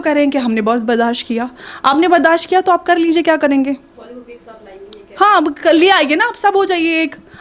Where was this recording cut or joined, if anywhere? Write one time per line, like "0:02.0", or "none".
none